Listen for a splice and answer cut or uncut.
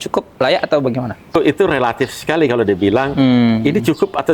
cut